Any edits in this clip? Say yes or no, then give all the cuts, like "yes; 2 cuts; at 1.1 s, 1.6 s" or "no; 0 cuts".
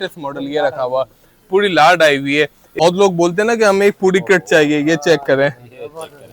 yes; 1 cut; at 2.6 s